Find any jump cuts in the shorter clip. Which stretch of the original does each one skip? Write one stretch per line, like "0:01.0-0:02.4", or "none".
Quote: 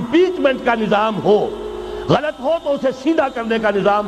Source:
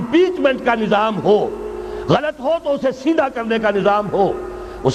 none